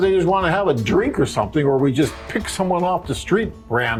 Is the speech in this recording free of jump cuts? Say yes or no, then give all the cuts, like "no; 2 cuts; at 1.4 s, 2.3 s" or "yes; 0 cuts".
yes; 0 cuts